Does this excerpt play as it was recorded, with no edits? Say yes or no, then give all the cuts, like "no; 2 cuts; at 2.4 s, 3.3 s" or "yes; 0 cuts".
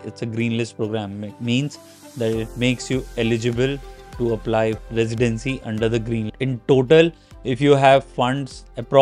no; 2 cuts; at 4.8 s, 6.3 s